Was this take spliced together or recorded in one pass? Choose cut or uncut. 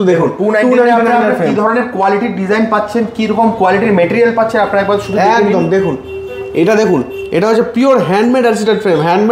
uncut